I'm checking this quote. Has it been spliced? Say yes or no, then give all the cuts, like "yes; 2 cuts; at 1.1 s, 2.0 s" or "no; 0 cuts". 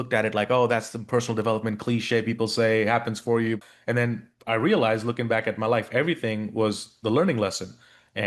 yes; 1 cut; at 3.6 s